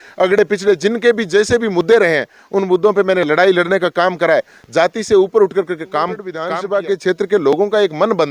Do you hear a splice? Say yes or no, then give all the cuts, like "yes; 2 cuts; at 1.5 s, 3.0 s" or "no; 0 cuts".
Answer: yes; 1 cut; at 6.4 s